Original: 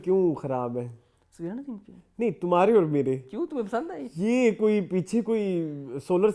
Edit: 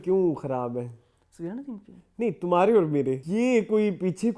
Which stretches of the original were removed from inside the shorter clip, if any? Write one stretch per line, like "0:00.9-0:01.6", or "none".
0:03.2-0:04.1